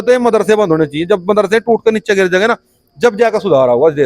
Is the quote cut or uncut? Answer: uncut